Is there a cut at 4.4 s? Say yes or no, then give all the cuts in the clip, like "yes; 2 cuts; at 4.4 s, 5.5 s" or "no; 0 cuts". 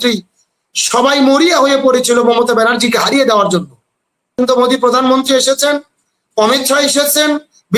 yes; 1 cut; at 4.4 s